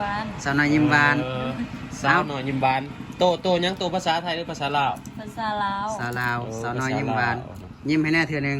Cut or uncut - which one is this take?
uncut